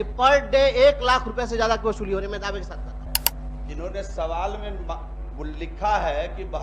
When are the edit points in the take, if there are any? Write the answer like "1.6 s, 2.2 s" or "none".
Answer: 3.2 s